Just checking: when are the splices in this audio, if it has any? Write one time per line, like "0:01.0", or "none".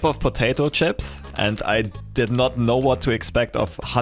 none